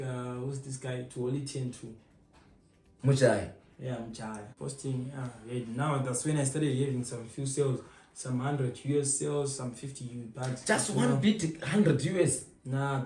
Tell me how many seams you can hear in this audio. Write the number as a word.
one